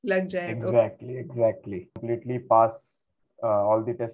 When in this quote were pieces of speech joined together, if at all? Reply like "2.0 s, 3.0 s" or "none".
2.0 s